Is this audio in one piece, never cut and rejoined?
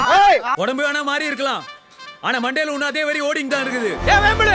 yes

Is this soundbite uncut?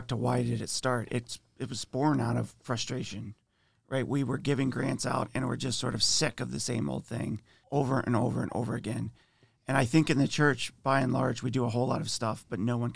no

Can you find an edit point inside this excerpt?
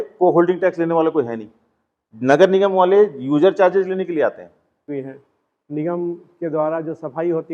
yes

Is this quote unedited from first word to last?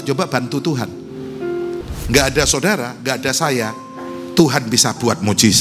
no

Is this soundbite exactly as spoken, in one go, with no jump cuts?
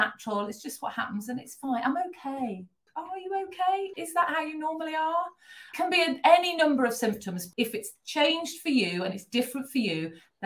no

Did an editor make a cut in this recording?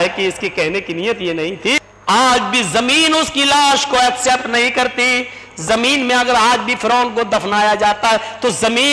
yes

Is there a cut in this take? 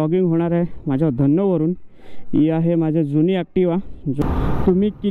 yes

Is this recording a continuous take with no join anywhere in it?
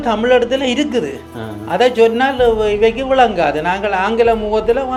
yes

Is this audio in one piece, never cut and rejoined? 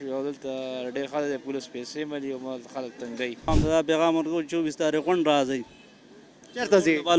no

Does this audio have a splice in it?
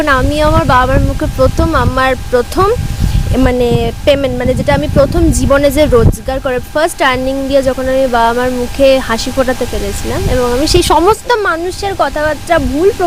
no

